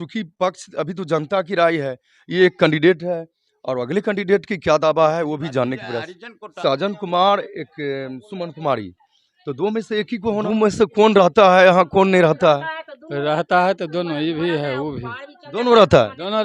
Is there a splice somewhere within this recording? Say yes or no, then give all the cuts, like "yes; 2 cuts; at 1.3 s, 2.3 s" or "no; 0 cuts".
yes; 2 cuts; at 6.5 s, 10.4 s